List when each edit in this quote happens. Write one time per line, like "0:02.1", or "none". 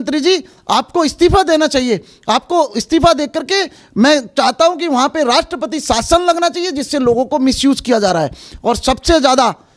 none